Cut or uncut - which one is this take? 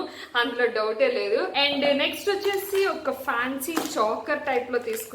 cut